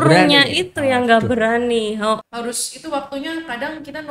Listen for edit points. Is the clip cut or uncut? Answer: cut